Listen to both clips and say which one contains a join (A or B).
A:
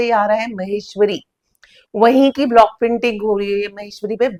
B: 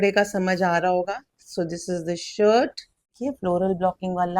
B